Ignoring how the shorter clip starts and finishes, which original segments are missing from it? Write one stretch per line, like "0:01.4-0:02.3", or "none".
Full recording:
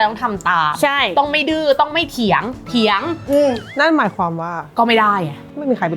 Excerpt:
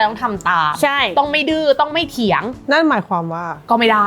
0:02.6-0:03.7